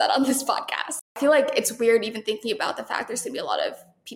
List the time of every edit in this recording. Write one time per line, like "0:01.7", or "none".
0:01.0